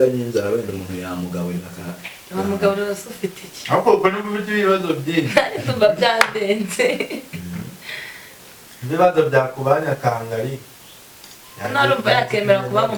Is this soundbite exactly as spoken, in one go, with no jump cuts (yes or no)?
yes